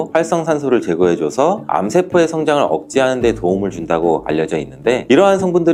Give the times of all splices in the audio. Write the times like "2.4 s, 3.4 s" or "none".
none